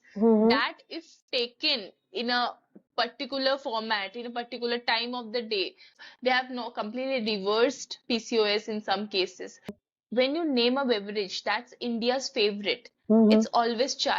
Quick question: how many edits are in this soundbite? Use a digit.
2